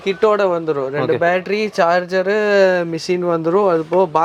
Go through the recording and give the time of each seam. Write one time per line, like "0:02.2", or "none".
none